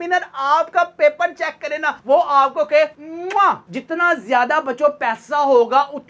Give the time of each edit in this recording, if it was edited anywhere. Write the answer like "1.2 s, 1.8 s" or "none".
3.6 s

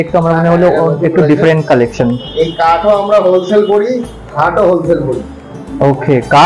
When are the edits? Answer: none

